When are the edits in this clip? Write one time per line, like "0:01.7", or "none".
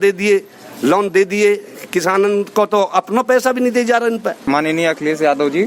0:04.4